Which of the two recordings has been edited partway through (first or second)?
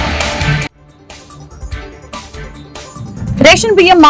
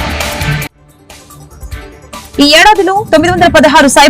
second